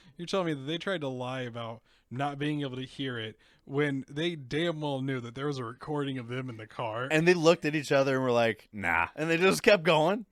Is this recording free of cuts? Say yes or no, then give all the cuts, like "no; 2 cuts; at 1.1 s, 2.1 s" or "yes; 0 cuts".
yes; 0 cuts